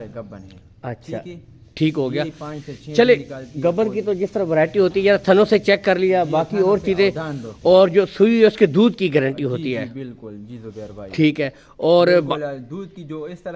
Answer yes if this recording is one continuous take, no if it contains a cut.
yes